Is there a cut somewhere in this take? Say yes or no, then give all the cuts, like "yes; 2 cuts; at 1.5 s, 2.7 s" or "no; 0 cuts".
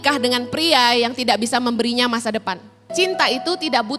yes; 1 cut; at 2.9 s